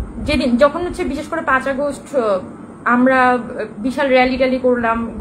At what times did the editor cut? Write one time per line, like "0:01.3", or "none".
none

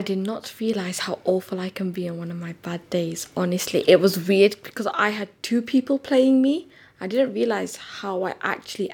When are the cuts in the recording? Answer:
none

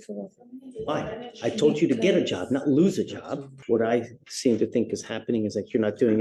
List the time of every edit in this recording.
0:03.5

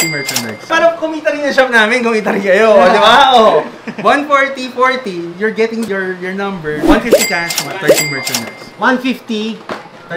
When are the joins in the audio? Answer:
none

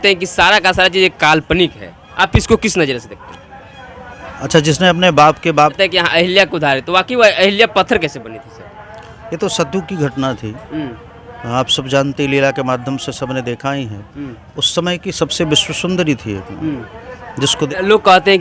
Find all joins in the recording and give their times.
0:05.8
0:17.7

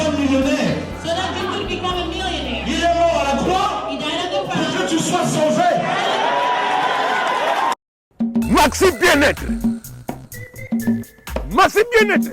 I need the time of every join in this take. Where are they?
0:08.1

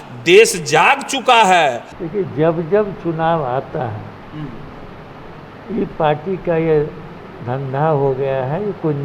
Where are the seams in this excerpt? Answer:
0:01.9

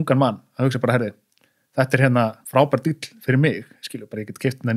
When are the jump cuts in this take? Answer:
0:02.4

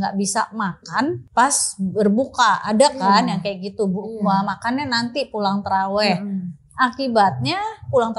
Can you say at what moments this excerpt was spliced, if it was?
0:01.2

